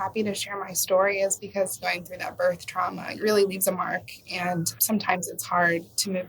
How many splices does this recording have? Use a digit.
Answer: 3